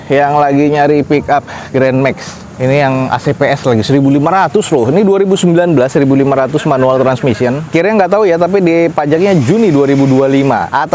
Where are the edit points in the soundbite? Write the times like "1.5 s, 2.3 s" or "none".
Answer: none